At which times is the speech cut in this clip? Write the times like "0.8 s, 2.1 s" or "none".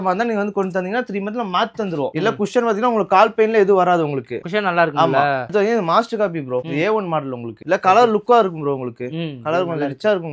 2.1 s, 5.5 s, 7.6 s